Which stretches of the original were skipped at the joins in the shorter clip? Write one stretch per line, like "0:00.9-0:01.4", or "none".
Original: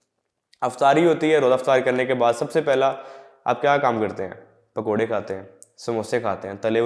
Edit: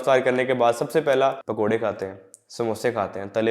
0:03.0-0:04.7